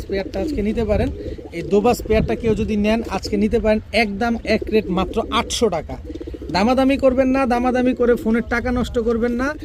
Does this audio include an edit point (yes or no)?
no